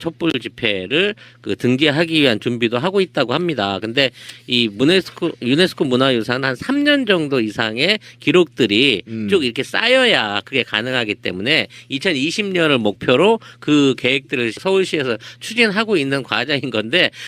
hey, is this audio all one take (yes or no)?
yes